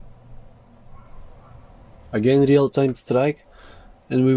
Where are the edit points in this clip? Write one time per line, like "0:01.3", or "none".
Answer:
0:02.0